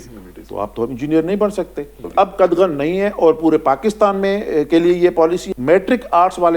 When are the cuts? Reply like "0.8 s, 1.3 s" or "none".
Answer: 2.0 s, 5.4 s